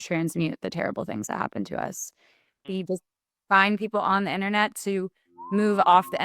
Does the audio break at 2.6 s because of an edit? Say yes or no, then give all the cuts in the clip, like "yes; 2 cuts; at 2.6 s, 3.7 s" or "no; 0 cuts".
yes; 1 cut; at 2.6 s